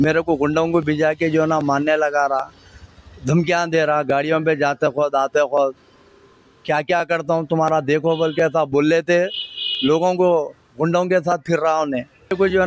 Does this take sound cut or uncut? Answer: uncut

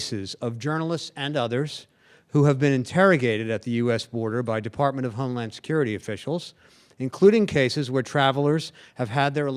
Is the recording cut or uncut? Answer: cut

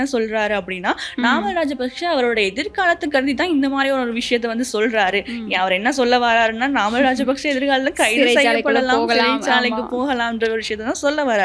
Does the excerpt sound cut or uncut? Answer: uncut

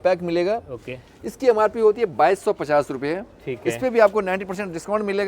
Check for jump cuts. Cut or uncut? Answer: uncut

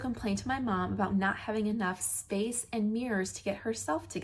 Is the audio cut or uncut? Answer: uncut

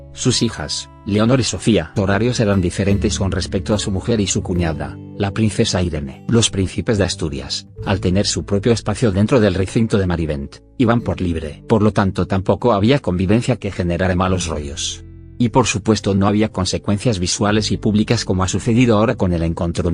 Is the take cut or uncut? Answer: uncut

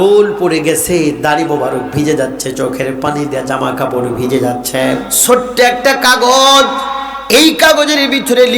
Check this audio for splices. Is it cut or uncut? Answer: cut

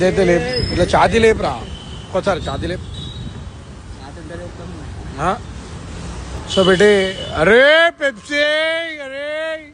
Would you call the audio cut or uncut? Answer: uncut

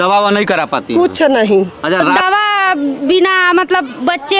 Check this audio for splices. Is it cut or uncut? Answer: cut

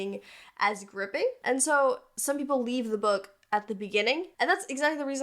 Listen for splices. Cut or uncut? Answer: cut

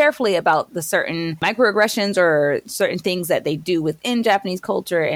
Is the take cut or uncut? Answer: cut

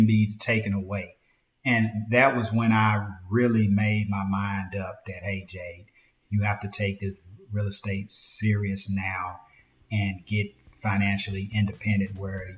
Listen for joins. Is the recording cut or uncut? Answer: uncut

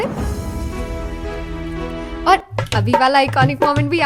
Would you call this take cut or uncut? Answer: uncut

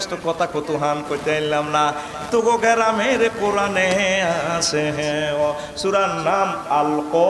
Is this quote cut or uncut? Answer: uncut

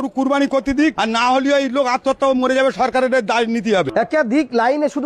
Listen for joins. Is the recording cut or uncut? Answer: cut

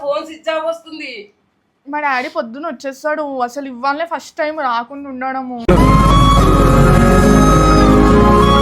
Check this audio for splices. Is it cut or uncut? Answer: uncut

